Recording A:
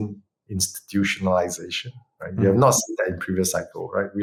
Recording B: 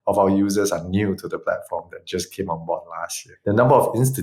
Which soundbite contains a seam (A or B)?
B